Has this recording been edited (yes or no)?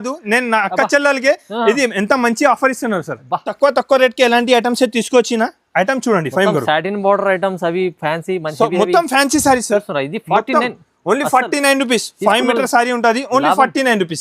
yes